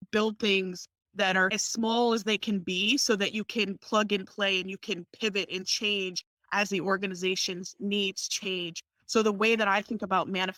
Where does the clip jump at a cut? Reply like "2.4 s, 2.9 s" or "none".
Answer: none